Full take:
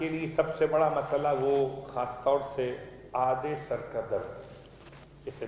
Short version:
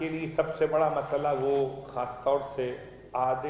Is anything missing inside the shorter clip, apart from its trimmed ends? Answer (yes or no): no